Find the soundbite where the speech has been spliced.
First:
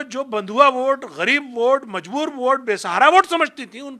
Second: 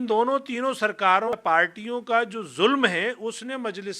second; 1 cut; at 1.3 s

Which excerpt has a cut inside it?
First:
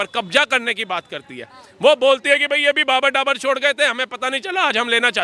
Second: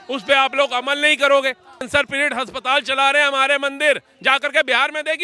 second; 1 cut; at 1.8 s

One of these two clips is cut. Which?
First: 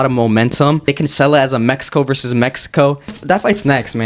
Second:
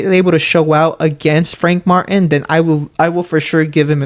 first; 2 cuts; at 0.8 s, 3.2 s

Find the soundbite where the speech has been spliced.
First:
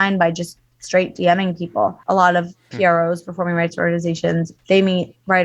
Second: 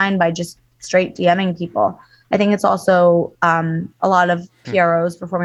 first; 2 cuts; at 2.0 s, 4.5 s

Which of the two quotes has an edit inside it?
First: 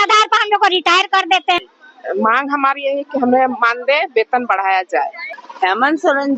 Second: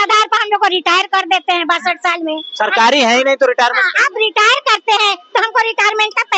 first; 2 cuts; at 1.6 s, 5.3 s

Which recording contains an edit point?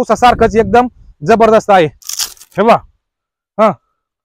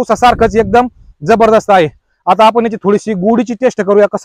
first; 1 cut; at 2.1 s

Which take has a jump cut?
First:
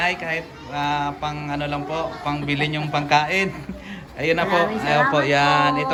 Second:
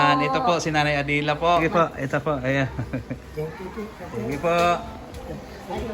second; 1 cut; at 1.6 s

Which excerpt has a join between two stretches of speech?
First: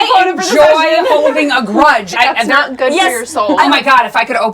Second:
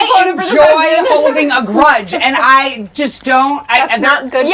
first; 2 cuts; at 2.1 s, 3.6 s

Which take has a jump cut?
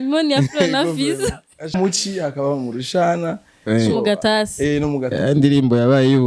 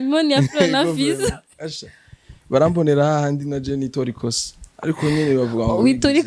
first; 1 cut; at 1.7 s

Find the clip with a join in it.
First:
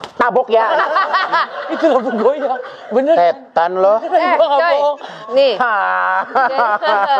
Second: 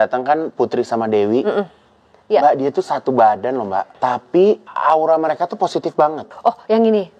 second; 3 cuts; at 3.9 s, 4.7 s, 6.2 s

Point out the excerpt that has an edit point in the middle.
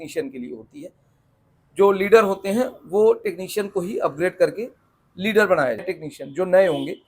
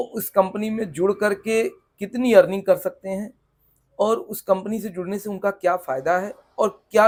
first; 1 cut; at 6.0 s

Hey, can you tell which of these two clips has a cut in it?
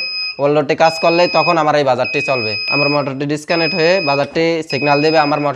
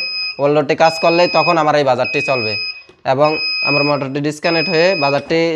first; 1 cut; at 2.6 s

